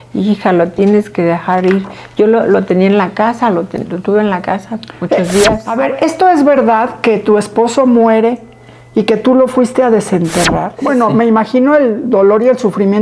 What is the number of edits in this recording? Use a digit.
2